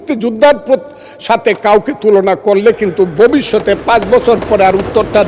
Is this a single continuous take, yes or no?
yes